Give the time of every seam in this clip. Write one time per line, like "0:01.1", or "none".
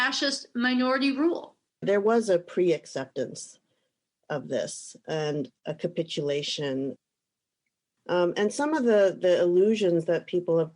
0:01.8
0:07.5

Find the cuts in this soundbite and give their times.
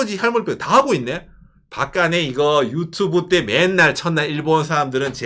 none

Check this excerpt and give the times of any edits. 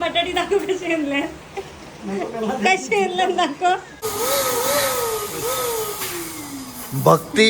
0:04.0

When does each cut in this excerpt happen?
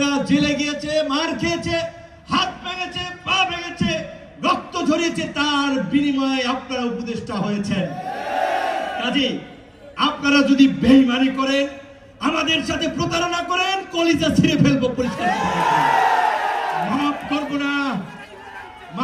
none

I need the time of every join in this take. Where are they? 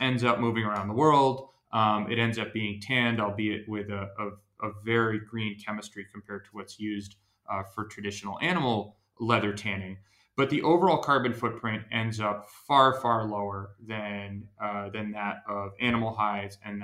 none

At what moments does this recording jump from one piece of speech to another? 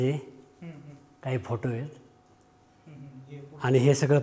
none

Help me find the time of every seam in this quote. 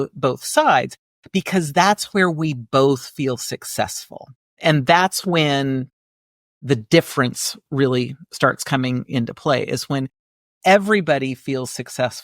0:04.6

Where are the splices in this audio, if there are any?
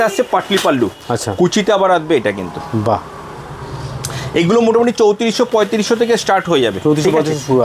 none

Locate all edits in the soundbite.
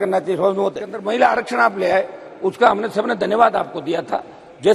0:00.9

